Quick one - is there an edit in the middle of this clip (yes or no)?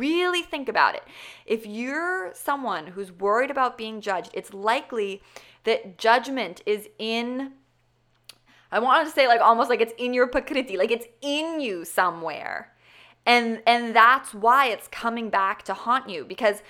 no